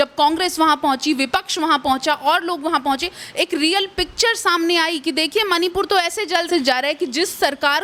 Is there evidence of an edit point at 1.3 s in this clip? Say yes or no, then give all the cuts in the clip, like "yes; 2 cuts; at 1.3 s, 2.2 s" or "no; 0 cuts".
no; 1 cut; at 6.5 s